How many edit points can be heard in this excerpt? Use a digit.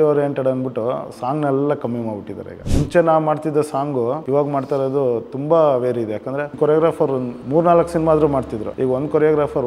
4